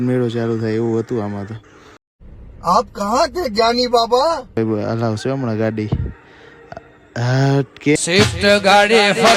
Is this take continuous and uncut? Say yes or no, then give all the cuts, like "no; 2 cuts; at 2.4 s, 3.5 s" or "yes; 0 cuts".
no; 2 cuts; at 4.6 s, 8.0 s